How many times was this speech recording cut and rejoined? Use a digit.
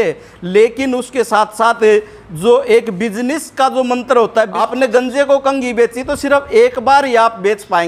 1